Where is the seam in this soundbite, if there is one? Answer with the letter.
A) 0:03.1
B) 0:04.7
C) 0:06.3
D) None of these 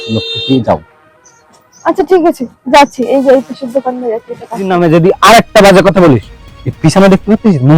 B